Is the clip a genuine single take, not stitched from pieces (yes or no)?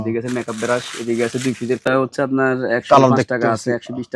no